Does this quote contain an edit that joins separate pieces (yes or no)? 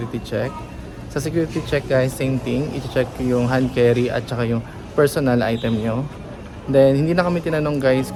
no